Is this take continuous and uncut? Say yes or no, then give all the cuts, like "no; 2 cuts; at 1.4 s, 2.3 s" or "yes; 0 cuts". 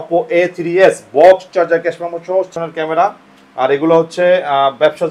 no; 1 cut; at 2.5 s